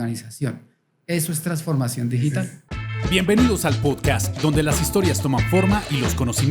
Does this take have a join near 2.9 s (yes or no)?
yes